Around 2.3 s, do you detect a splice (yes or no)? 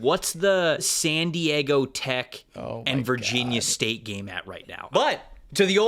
no